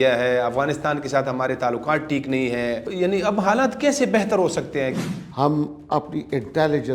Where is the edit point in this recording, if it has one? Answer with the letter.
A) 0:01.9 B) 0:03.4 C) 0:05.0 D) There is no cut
C